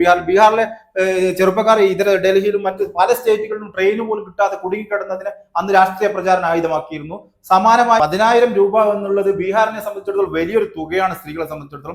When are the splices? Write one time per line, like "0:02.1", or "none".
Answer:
0:08.0